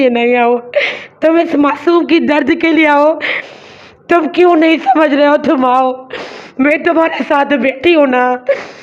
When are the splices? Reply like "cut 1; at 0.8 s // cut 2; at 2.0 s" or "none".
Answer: cut 1; at 3.5 s